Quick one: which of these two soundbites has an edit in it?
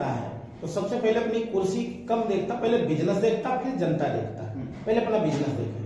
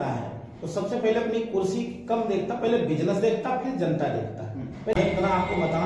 second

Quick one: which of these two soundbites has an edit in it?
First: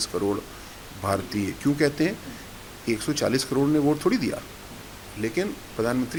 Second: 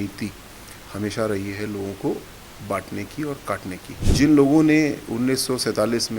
second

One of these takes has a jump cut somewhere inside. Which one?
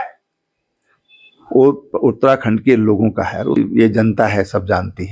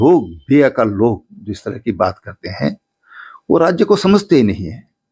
first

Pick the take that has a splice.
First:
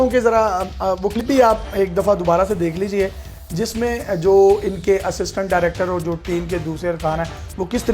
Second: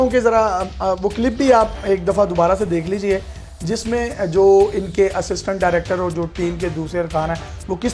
first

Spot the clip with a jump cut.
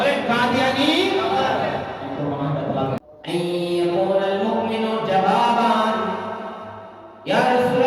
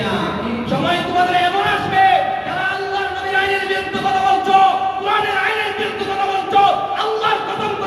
first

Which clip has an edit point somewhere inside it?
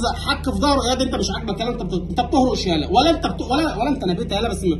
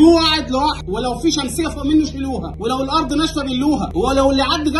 second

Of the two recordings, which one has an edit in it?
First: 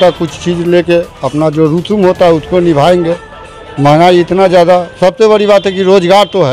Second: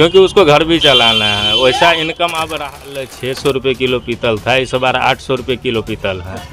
second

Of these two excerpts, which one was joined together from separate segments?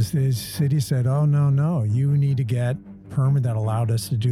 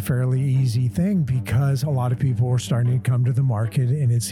first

